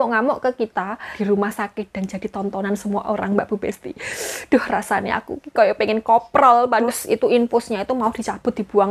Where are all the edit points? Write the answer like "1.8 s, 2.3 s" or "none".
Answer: 1.0 s, 6.9 s